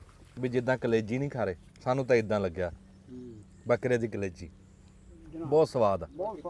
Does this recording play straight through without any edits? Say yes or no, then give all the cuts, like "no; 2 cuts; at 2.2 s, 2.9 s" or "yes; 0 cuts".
yes; 0 cuts